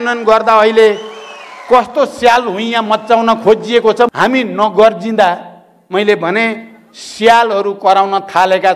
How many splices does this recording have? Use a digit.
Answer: 1